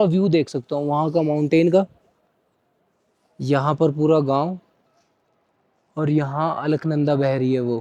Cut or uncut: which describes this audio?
uncut